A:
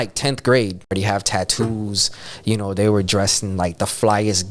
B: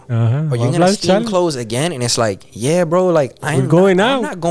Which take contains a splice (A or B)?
A